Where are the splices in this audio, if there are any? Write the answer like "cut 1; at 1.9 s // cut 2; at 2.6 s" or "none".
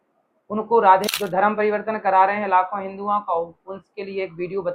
cut 1; at 1.0 s